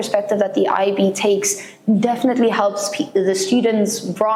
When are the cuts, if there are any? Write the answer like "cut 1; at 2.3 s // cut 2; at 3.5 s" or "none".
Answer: none